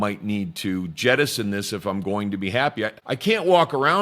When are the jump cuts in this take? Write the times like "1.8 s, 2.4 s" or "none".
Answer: 3.0 s

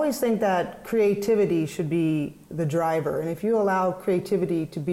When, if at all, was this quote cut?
none

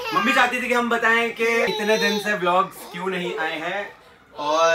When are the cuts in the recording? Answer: 1.7 s

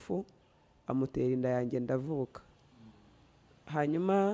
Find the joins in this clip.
none

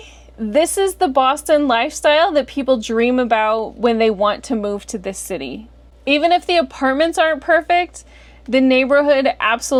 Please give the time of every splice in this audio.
none

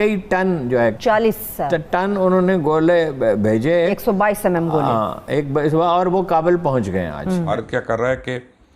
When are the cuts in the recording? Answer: 1.0 s, 7.4 s

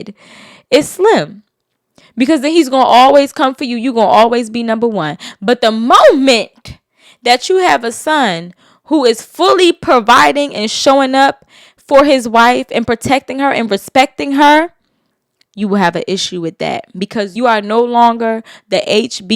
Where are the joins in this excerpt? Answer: 17.3 s

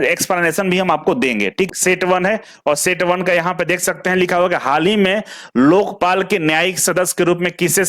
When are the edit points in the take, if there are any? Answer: 1.7 s

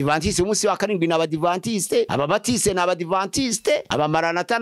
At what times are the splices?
2.1 s

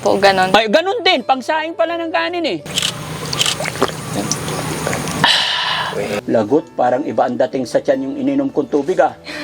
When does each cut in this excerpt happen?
2.7 s, 6.2 s

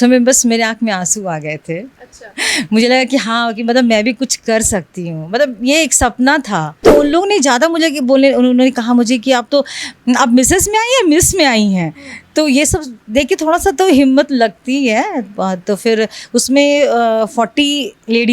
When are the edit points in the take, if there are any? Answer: 6.8 s

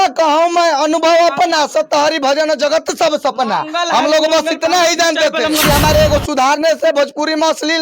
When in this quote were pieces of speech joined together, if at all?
5.6 s

